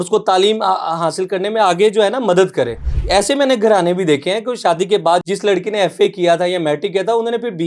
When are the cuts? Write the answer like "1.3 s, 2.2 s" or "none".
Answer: 5.2 s